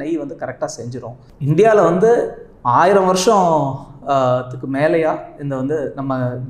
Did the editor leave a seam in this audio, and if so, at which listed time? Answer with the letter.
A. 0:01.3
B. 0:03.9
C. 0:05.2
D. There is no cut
A